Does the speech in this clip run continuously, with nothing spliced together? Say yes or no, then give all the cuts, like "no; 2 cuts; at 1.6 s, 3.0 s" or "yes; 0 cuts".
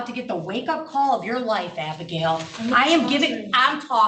yes; 0 cuts